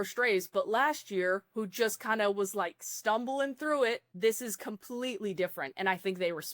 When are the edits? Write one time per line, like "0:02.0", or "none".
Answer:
0:04.1